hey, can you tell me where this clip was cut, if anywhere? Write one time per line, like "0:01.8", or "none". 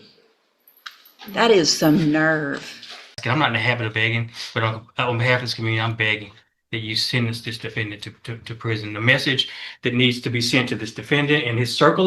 0:03.2